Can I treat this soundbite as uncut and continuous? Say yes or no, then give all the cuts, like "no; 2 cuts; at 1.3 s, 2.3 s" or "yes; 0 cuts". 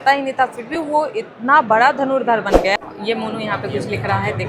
no; 1 cut; at 2.8 s